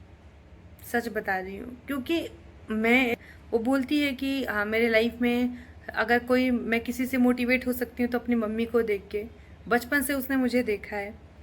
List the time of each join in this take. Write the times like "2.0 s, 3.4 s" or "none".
3.3 s